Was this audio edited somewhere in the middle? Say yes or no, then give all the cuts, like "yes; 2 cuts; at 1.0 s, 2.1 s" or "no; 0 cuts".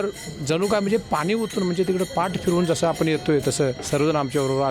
yes; 1 cut; at 3.8 s